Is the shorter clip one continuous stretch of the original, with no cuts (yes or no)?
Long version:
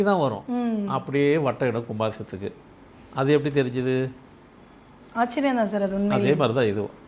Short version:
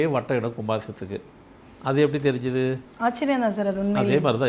no